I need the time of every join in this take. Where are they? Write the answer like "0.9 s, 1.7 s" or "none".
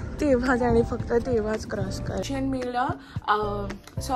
2.2 s